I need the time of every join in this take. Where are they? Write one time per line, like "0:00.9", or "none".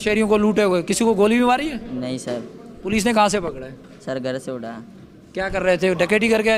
none